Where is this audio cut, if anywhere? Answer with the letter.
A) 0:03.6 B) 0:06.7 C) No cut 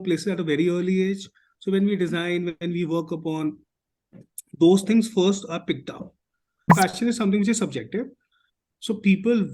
B